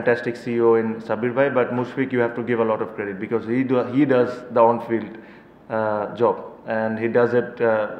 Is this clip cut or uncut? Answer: uncut